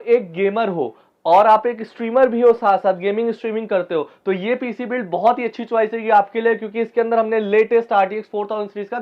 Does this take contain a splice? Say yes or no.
no